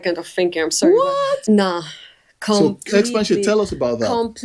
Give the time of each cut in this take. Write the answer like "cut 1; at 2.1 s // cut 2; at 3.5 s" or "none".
cut 1; at 1.4 s

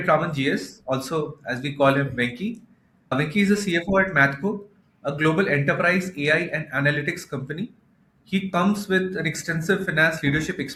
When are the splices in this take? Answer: none

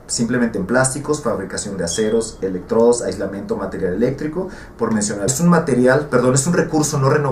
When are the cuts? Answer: none

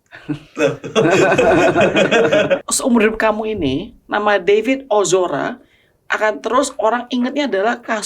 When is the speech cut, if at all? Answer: cut 1; at 2.6 s

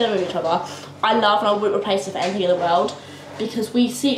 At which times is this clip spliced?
none

